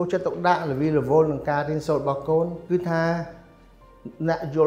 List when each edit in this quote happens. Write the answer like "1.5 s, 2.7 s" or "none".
2.6 s